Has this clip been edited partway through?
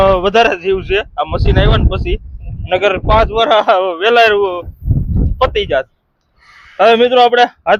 no; 0 cuts

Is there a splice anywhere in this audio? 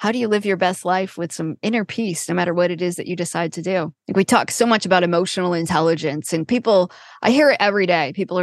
yes; 1 cut; at 4.0 s

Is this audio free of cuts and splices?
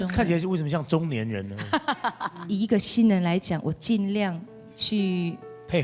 no; 1 cut; at 2.4 s

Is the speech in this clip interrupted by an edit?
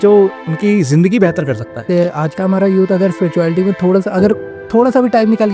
yes; 1 cut; at 1.8 s

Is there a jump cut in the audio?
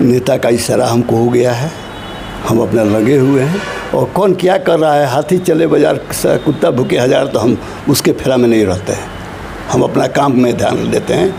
no; 0 cuts

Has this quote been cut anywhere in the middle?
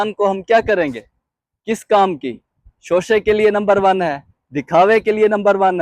no; 0 cuts

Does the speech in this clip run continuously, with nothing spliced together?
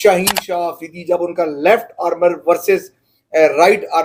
yes; 0 cuts

